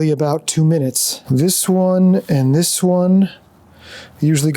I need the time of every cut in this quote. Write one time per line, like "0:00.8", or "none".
0:01.1